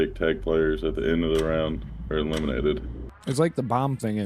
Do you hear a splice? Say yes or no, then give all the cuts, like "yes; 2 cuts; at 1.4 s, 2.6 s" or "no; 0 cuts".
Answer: yes; 1 cut; at 3.1 s